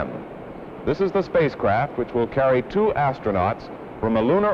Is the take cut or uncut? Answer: uncut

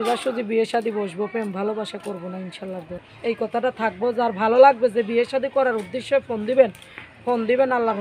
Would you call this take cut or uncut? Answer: cut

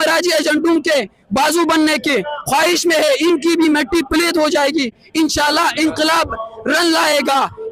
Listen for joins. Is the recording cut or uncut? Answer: uncut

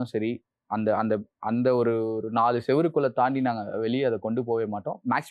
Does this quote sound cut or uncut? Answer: uncut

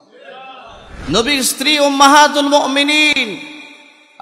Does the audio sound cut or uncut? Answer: cut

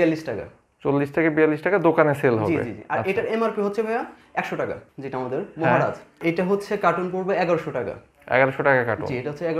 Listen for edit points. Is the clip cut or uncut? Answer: cut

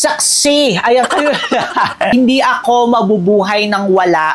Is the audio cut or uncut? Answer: cut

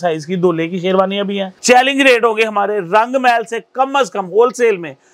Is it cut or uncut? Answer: cut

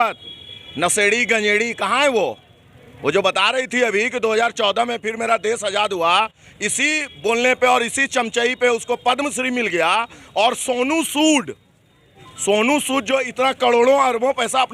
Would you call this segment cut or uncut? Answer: uncut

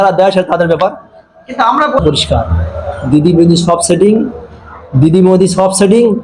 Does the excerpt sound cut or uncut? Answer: cut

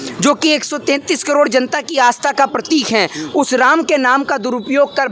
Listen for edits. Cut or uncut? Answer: uncut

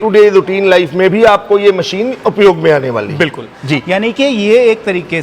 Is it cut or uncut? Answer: cut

